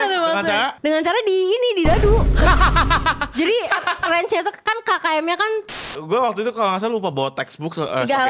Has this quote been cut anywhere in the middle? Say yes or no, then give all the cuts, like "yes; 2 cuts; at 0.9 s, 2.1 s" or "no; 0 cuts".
yes; 2 cuts; at 2.3 s, 5.8 s